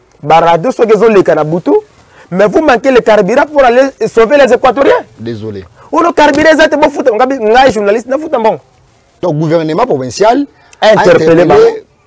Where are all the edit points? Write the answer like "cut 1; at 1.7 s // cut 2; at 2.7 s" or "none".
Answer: cut 1; at 9.1 s